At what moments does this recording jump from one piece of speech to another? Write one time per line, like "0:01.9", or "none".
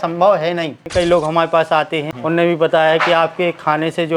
0:00.8
0:02.1

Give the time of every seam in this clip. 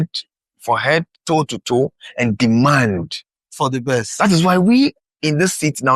0:05.1

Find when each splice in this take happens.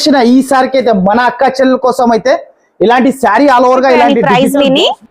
0:04.2

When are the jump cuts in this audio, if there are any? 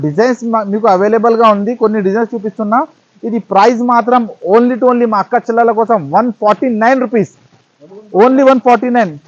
none

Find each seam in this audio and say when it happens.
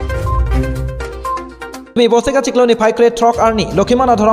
0:01.9

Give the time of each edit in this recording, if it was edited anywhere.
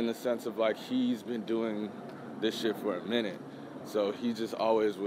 none

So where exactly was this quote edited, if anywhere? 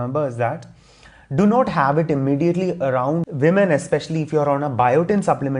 0:03.2

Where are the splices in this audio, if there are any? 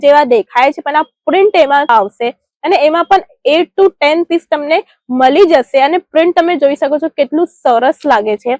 none

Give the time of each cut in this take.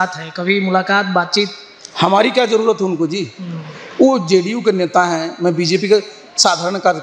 none

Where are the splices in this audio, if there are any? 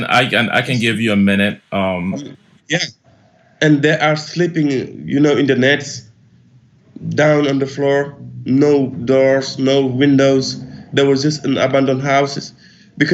0:02.3

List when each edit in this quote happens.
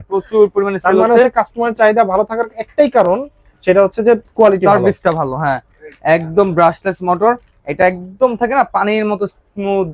none

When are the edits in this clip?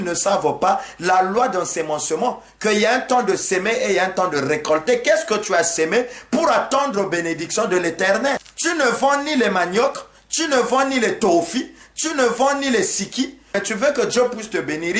0:08.5
0:13.6

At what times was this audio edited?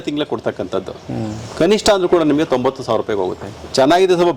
none

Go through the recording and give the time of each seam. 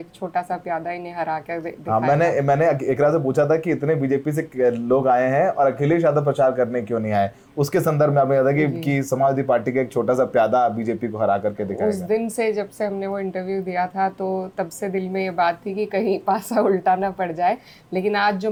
none

